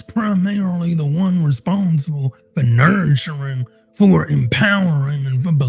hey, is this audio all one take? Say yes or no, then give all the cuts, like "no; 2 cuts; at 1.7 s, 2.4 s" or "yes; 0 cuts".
yes; 0 cuts